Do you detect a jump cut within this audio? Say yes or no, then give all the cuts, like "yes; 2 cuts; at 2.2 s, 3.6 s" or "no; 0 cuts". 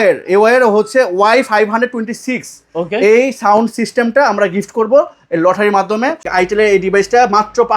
yes; 1 cut; at 6.3 s